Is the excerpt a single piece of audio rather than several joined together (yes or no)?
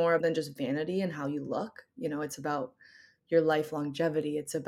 yes